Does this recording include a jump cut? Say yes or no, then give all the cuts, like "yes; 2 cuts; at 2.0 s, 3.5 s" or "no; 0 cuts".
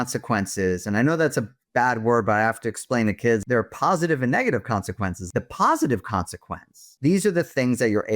yes; 3 cuts; at 3.4 s, 5.2 s, 6.9 s